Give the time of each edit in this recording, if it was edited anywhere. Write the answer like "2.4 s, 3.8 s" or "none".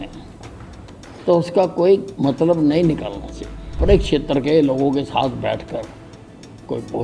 3.8 s

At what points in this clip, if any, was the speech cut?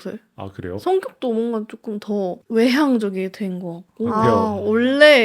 2.4 s, 4.1 s

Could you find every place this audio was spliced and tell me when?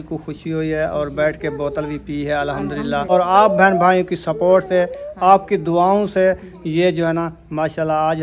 3.1 s

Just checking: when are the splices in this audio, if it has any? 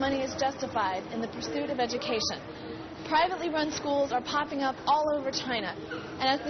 none

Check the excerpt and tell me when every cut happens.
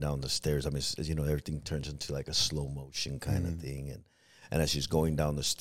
none

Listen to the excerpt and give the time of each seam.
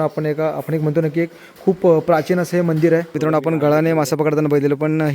3.2 s

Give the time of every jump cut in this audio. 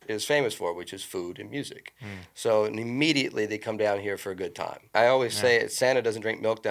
4.9 s

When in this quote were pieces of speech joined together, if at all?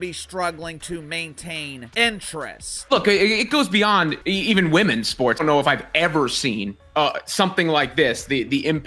1.8 s, 2.7 s, 4.2 s, 5.4 s

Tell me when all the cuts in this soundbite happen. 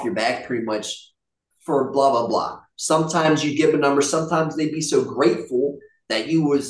none

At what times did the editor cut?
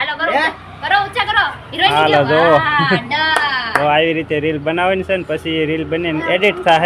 none

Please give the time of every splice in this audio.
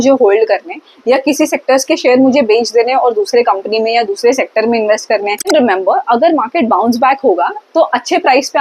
5.5 s

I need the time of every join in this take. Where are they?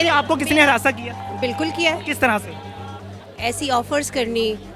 3.1 s

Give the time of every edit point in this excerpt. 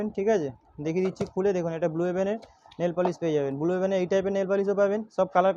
none

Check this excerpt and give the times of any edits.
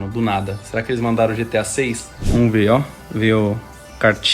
2.1 s

